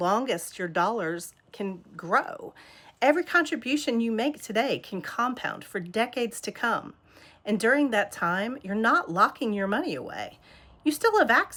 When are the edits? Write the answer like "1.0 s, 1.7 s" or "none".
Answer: none